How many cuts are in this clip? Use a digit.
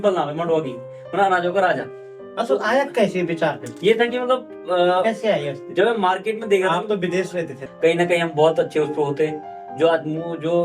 1